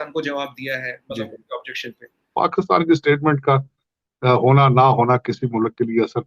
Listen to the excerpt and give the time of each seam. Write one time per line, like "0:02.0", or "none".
0:02.3